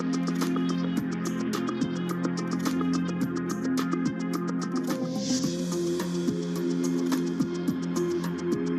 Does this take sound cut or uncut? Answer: cut